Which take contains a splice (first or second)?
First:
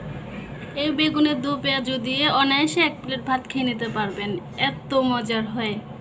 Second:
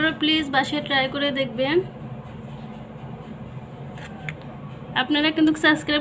second